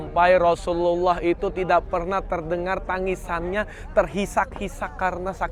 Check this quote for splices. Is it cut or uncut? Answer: uncut